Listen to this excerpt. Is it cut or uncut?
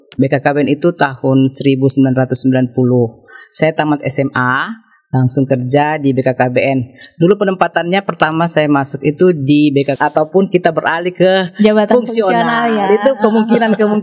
cut